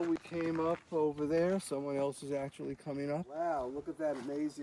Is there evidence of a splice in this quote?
yes; 1 cut; at 3.3 s

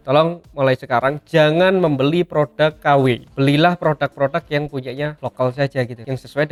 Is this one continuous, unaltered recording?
yes; 0 cuts

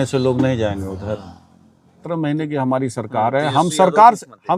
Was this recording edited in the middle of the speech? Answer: yes; 1 cut; at 2.0 s

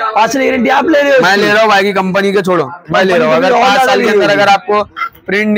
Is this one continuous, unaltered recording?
yes; 0 cuts

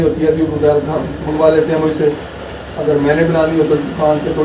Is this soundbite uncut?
yes; 0 cuts

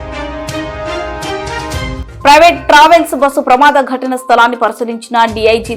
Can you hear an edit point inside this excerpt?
no; 0 cuts

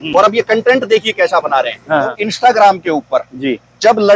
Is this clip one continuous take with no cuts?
no; 1 cut; at 2.1 s

